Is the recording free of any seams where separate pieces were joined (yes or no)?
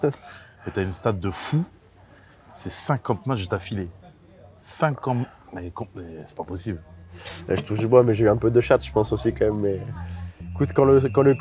yes